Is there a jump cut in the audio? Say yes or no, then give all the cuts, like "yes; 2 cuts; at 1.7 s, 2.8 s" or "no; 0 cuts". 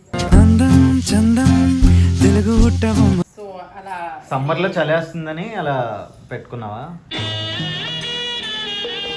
no; 0 cuts